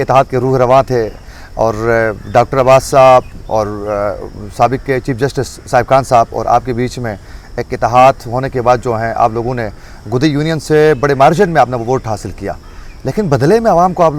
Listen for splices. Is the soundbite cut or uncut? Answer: uncut